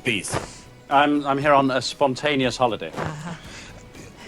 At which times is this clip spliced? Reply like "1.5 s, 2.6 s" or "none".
none